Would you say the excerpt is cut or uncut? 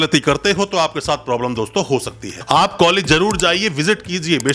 cut